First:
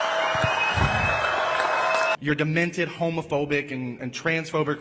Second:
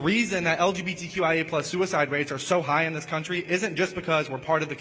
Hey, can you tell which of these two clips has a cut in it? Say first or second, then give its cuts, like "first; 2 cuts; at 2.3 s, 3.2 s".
first; 1 cut; at 2.2 s